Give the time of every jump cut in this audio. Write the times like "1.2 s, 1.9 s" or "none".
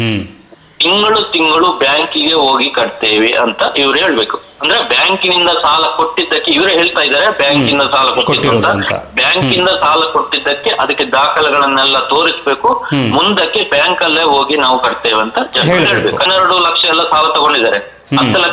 16.3 s